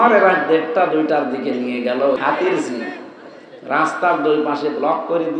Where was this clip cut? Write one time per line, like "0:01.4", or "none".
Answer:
0:02.2